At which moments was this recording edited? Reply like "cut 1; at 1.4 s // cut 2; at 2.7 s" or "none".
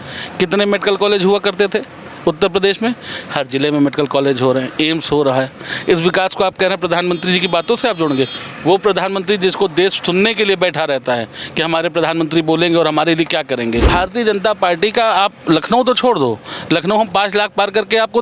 cut 1; at 13.9 s

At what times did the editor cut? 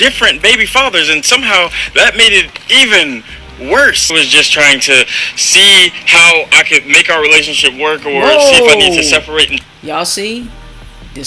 cut 1; at 4.0 s

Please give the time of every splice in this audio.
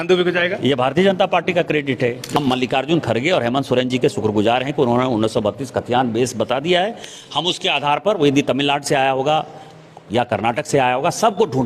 cut 1; at 2.4 s

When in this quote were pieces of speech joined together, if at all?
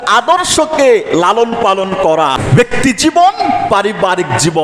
cut 1; at 2.4 s

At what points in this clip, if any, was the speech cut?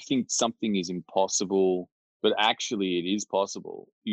none

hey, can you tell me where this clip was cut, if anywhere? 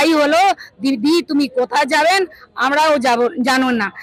none

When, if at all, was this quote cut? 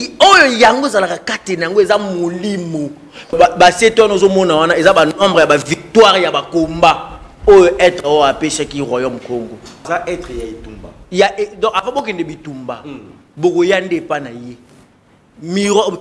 cut 1; at 3.3 s // cut 2; at 9.9 s

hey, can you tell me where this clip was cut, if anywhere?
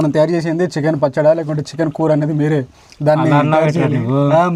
none

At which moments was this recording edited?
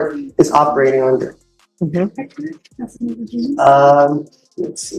none

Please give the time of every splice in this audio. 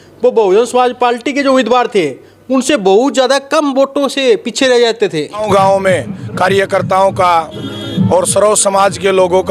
cut 1; at 5.4 s

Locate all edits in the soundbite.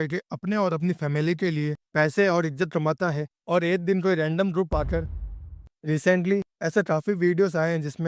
cut 1; at 5.3 s

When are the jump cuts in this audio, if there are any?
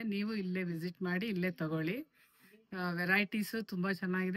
none

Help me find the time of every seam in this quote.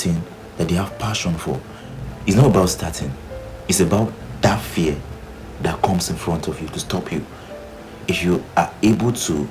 cut 1; at 1.8 s

